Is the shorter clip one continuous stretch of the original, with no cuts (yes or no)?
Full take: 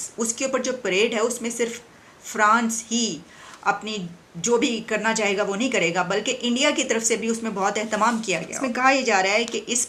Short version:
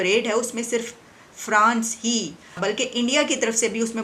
no